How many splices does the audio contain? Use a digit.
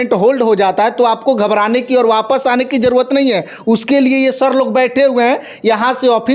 0